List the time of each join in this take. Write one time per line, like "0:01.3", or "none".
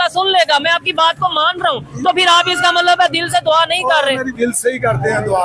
0:04.3